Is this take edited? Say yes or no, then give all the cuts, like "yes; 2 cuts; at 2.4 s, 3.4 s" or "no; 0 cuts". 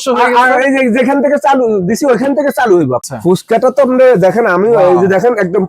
yes; 1 cut; at 3.1 s